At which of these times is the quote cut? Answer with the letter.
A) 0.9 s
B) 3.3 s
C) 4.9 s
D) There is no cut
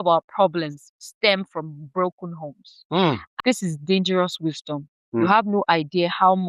B